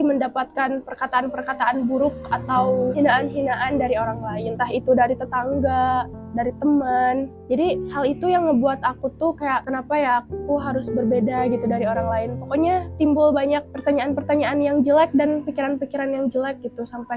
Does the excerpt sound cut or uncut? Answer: uncut